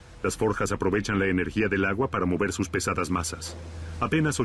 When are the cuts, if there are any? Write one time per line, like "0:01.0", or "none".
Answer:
none